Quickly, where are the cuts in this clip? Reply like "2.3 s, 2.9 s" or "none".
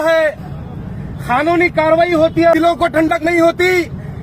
2.6 s